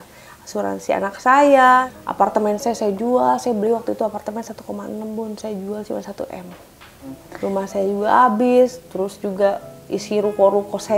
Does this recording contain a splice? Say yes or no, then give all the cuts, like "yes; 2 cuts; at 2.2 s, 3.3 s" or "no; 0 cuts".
yes; 2 cuts; at 1.9 s, 7.3 s